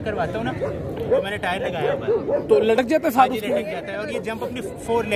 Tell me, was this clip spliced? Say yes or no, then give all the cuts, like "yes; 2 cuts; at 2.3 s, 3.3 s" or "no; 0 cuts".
no; 0 cuts